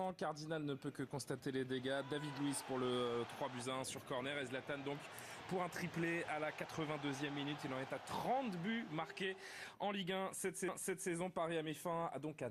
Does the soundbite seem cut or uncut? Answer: uncut